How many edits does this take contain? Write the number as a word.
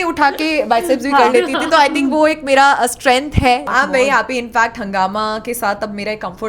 one